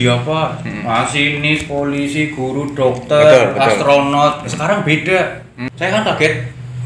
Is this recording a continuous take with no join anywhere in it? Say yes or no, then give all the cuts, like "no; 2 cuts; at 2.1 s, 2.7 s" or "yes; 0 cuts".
no; 1 cut; at 5.5 s